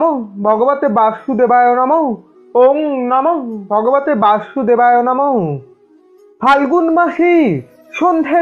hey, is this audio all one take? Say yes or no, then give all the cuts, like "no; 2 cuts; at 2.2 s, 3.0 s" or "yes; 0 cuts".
yes; 0 cuts